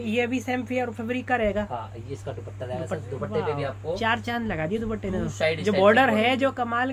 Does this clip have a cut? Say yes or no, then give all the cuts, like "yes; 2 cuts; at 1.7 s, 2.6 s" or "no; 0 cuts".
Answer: no; 0 cuts